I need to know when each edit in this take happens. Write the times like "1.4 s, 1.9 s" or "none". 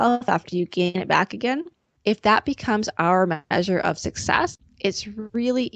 1.9 s, 3.4 s, 4.6 s